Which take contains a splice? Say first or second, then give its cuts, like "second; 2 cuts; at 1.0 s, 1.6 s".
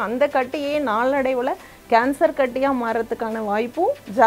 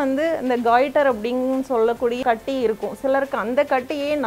second; 1 cut; at 2.2 s